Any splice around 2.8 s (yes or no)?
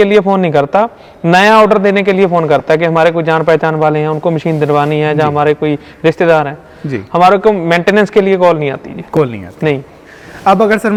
no